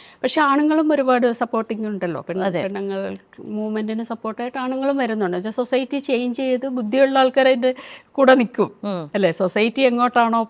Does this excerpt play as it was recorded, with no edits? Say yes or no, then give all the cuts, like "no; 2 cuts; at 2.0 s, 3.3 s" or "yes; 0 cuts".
yes; 0 cuts